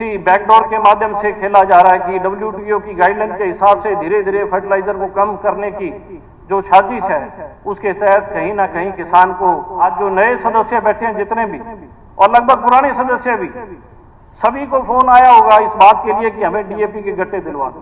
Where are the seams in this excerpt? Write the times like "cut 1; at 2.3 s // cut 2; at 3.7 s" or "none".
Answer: cut 1; at 9.8 s